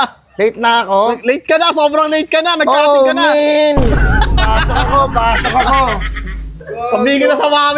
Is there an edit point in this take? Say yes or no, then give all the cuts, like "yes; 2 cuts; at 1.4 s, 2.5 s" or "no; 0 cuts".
no; 0 cuts